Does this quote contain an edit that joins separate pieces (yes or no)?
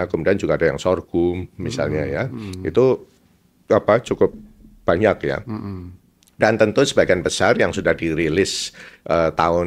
no